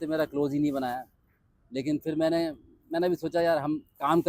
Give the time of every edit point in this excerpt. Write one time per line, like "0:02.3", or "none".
none